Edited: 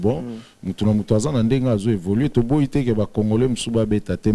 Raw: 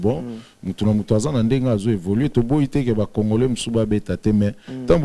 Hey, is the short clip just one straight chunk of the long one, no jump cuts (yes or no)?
yes